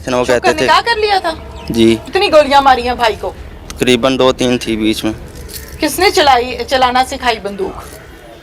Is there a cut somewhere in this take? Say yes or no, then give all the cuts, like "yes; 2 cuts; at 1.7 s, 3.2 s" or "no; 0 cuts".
yes; 1 cut; at 2.1 s